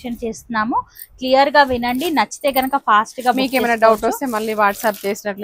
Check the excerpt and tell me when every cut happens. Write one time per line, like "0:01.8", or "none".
none